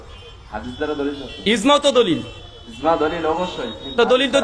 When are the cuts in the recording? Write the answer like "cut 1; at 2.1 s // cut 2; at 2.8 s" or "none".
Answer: none